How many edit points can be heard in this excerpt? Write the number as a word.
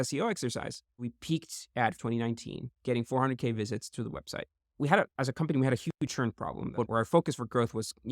three